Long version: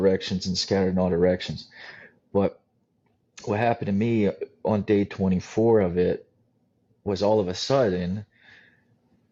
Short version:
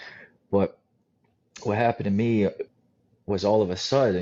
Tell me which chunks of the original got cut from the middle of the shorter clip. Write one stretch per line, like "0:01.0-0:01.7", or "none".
0:04.5-0:06.4